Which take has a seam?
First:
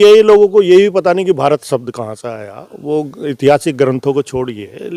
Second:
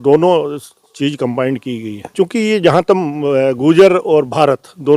second; 1 cut; at 2.1 s

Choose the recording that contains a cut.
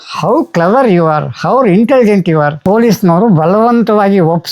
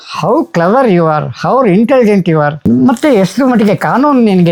first; 1 cut; at 2.6 s

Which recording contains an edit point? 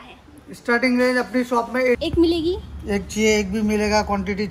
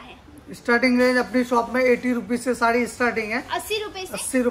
first; 1 cut; at 2.0 s

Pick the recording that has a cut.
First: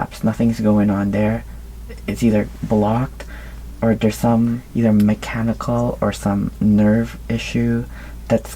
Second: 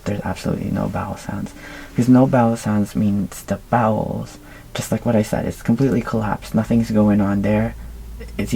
first; 1 cut; at 4.6 s

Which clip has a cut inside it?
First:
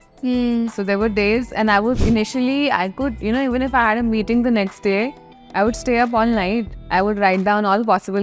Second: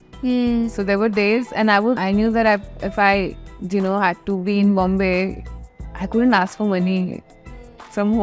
first; 1 cut; at 2.0 s

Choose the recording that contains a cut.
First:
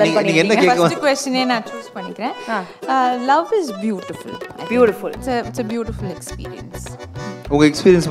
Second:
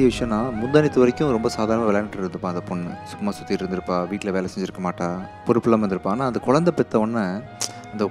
second; 1 cut; at 5.3 s

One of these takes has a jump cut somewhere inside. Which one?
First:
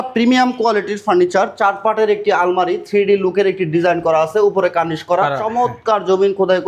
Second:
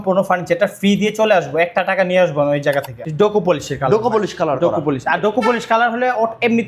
second; 1 cut; at 2.9 s

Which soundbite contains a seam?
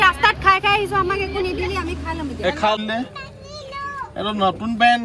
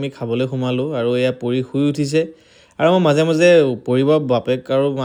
first; 1 cut; at 2.8 s

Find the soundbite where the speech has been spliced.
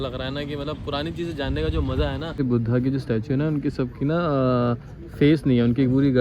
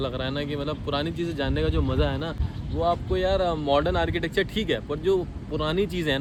first; 1 cut; at 2.4 s

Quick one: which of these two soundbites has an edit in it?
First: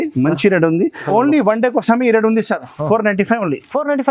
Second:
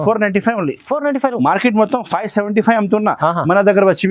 first; 1 cut; at 1.1 s

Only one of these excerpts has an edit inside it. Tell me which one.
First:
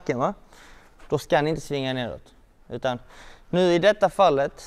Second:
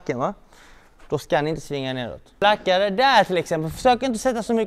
second; 1 cut; at 2.3 s

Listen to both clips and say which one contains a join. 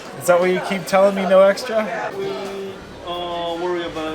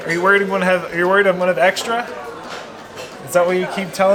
first; 1 cut; at 2.1 s

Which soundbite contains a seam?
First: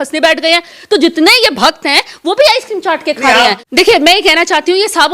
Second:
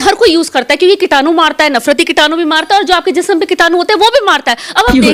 first; 1 cut; at 3.7 s

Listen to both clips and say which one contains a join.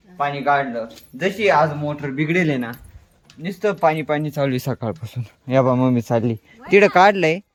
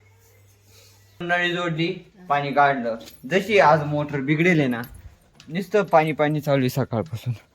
second; 1 cut; at 1.2 s

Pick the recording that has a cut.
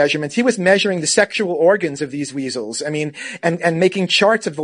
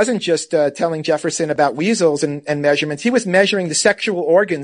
second; 1 cut; at 1.6 s

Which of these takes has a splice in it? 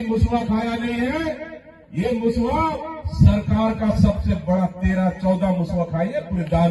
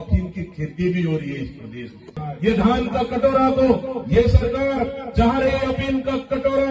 second; 1 cut; at 2.3 s

